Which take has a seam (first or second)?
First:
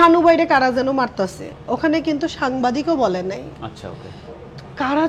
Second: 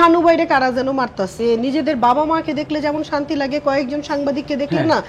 second